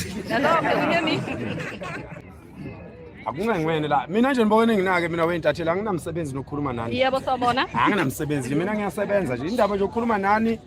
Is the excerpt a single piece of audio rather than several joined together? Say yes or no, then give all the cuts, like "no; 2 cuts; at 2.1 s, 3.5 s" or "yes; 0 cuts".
no; 1 cut; at 2.1 s